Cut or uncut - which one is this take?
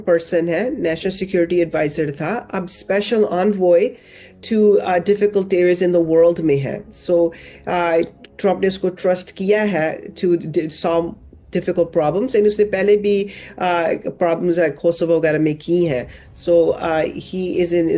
uncut